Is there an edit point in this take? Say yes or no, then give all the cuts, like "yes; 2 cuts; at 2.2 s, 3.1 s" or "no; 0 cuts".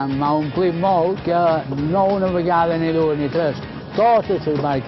yes; 1 cut; at 1.2 s